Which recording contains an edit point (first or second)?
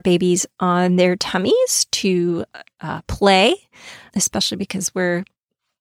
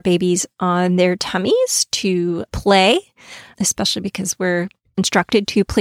second